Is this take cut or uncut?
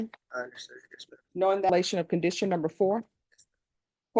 cut